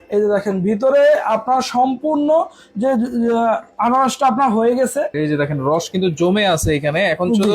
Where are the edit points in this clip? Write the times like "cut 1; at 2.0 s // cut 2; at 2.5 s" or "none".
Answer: cut 1; at 5.1 s